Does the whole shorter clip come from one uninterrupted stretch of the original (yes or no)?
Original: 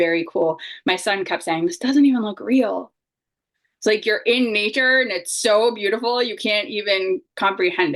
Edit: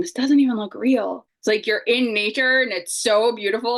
no